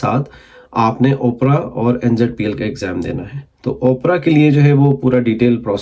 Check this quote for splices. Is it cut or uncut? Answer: uncut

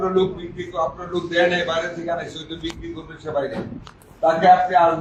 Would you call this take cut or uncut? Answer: uncut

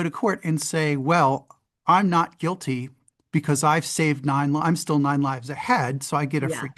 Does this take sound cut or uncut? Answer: uncut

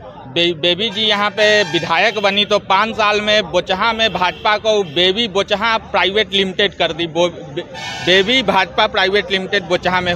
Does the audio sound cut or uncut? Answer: uncut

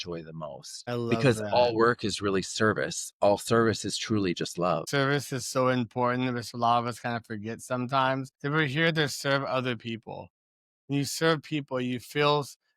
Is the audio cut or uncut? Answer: cut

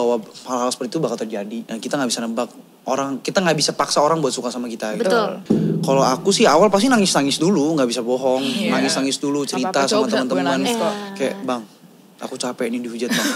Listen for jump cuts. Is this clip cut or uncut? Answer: cut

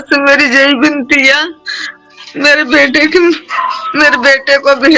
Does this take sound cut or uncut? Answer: uncut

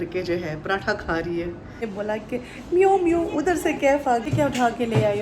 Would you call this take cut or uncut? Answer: cut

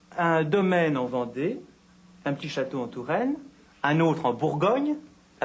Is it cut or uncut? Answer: cut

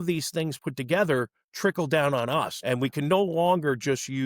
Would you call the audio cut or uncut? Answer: cut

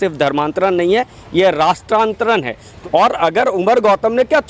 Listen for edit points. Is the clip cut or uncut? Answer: cut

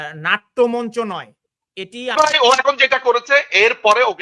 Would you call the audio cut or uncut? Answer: cut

